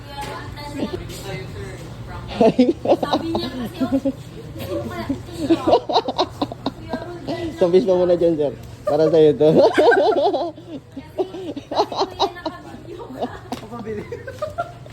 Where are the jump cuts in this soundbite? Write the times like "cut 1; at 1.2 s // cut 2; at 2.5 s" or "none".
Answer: cut 1; at 0.9 s